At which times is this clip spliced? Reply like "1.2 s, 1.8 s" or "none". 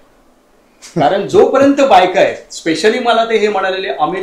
none